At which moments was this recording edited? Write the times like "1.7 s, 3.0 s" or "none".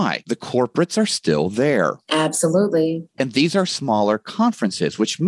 none